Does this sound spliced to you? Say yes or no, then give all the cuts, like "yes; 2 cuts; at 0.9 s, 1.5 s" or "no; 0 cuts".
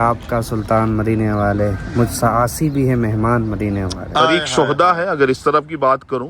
yes; 1 cut; at 4.3 s